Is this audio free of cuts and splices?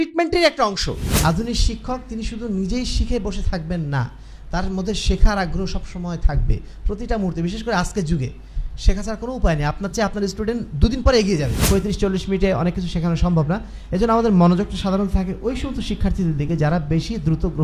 no; 2 cuts; at 1.1 s, 11.5 s

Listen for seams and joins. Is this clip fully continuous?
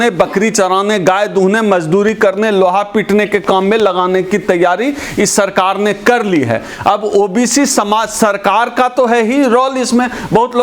yes; 0 cuts

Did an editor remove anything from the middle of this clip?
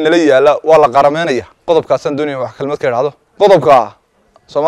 yes; 2 cuts; at 1.5 s, 3.2 s

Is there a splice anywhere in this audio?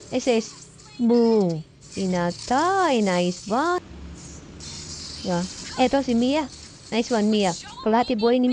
yes; 1 cut; at 3.8 s

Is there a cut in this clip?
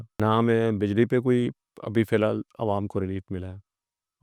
no; 0 cuts

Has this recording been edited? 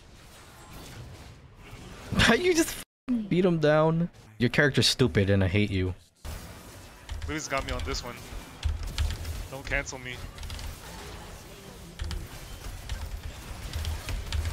yes; 1 cut; at 6.1 s

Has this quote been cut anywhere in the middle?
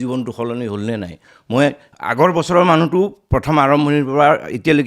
no; 0 cuts

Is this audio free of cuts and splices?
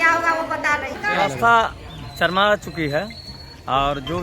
no; 1 cut; at 1.1 s

